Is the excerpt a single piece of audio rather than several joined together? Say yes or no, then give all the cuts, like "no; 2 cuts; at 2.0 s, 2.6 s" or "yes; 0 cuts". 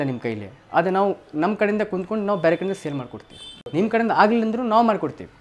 yes; 0 cuts